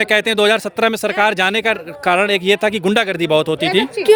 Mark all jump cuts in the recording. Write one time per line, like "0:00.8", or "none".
none